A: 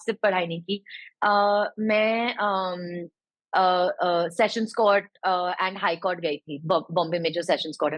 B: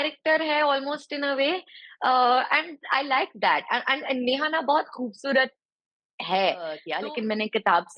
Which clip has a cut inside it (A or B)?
B